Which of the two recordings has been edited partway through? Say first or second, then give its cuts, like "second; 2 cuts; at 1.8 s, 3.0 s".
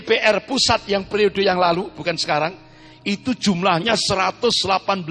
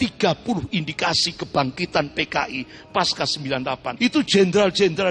second; 1 cut; at 3.9 s